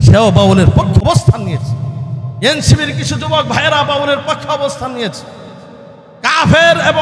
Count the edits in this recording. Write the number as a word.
one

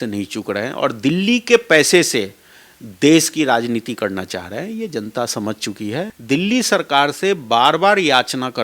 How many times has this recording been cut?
one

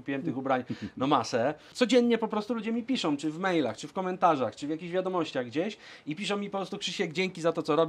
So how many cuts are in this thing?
one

